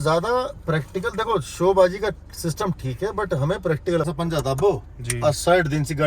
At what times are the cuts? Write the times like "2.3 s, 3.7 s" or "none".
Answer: 4.1 s